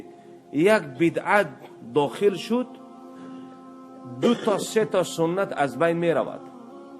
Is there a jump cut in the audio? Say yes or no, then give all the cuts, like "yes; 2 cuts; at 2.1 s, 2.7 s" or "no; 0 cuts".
yes; 2 cuts; at 2.7 s, 4.2 s